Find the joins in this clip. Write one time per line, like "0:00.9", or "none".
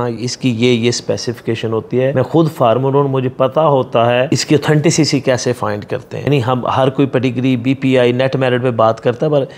0:02.1
0:04.3
0:06.3